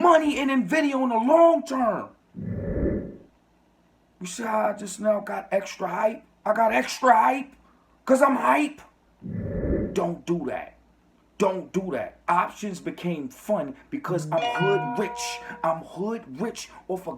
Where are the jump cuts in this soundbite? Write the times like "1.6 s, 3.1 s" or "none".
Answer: 2.2 s, 3.1 s, 9.2 s